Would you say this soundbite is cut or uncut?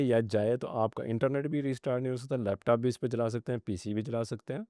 uncut